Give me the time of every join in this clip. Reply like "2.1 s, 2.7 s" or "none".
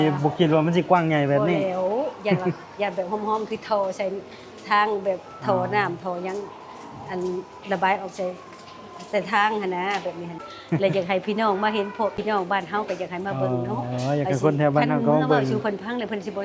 10.5 s, 12.1 s